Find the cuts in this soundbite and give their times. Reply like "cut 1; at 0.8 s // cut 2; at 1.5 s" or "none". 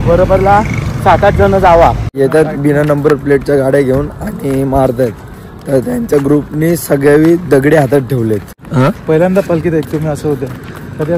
cut 1; at 2.1 s // cut 2; at 8.6 s